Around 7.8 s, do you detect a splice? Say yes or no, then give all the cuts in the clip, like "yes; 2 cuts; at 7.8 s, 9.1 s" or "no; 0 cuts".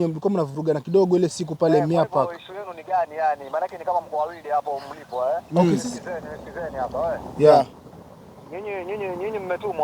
no; 1 cut; at 5.6 s